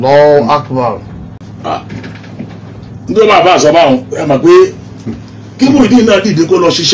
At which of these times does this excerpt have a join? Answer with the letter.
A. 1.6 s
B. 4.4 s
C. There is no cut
C